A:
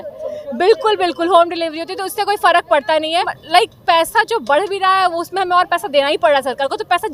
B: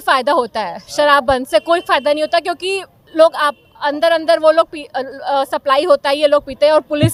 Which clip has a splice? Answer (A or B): A